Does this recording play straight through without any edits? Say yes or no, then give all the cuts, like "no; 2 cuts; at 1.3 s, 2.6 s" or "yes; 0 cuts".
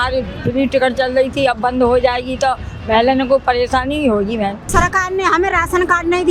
no; 1 cut; at 4.7 s